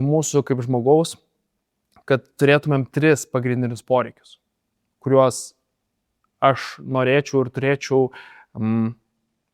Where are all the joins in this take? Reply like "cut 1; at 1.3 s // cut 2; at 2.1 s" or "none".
none